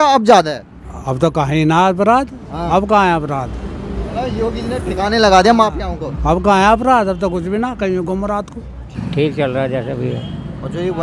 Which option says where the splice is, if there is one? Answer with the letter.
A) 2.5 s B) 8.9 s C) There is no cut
B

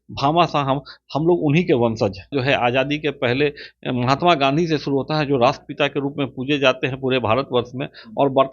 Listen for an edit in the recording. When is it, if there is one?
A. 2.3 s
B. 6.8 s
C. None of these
A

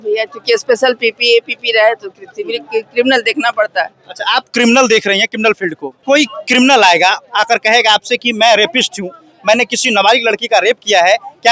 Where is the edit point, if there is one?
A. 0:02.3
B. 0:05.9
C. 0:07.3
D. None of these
B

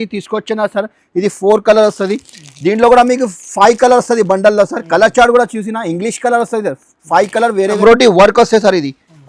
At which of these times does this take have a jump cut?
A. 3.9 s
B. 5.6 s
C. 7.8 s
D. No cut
C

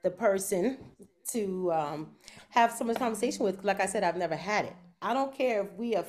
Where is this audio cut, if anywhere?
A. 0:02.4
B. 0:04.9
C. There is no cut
B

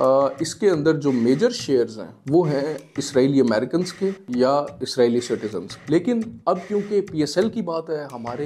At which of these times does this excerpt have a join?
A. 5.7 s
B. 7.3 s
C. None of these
A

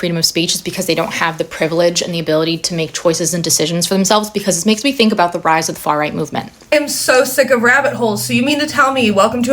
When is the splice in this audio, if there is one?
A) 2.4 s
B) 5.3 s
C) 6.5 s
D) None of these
C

